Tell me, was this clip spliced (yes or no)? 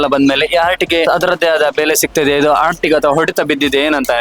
yes